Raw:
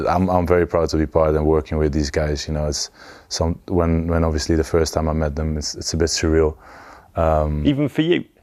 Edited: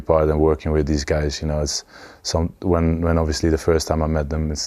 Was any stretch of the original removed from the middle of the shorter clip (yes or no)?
no